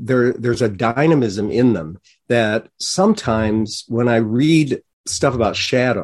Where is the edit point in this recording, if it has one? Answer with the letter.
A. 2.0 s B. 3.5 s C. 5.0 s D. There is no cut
C